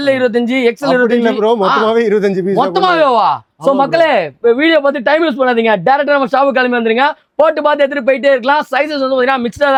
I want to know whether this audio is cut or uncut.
uncut